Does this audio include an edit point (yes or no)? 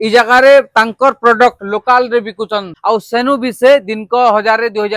no